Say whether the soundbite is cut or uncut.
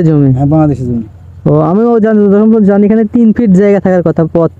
uncut